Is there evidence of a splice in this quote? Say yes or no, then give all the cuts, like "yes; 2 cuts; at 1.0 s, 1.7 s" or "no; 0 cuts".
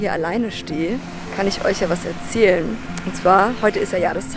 no; 0 cuts